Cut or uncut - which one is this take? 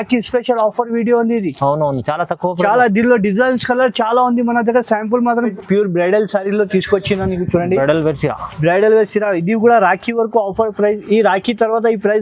cut